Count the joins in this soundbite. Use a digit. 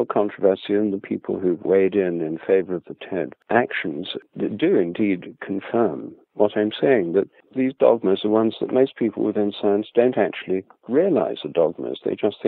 3